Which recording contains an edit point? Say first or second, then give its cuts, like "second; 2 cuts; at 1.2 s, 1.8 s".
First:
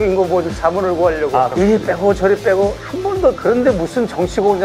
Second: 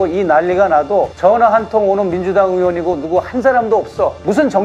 first; 2 cuts; at 1.5 s, 3.4 s